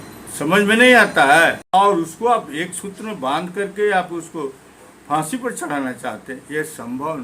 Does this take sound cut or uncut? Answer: cut